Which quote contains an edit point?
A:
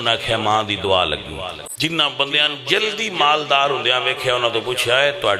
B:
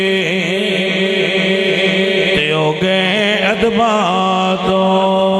A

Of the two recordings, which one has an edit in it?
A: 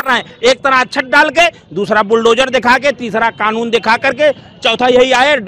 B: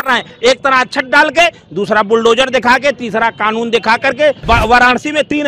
B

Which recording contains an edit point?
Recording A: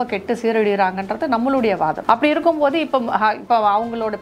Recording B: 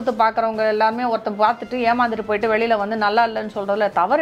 A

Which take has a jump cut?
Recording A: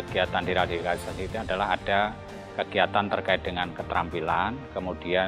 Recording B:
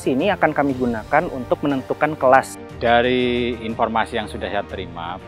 B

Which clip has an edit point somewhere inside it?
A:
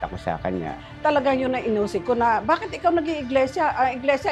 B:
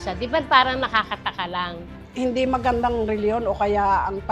B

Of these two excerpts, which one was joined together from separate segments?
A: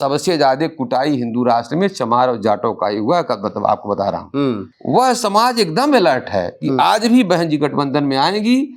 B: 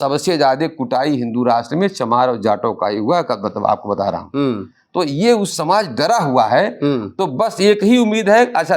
A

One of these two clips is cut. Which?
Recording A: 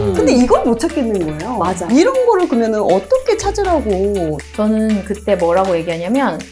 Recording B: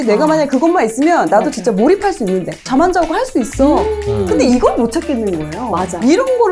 B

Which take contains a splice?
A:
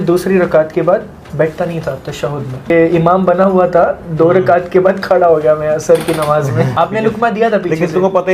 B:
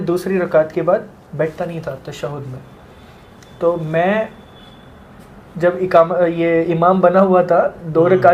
A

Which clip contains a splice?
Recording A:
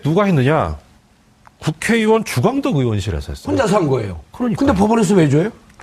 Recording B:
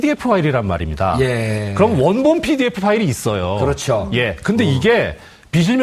A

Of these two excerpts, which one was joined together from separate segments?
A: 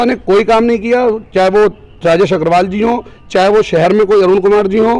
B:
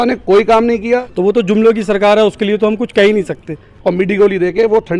B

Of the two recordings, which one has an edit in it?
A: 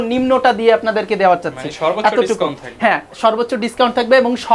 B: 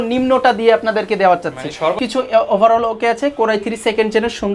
B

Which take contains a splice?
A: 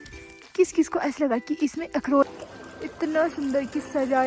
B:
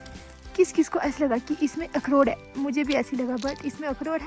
A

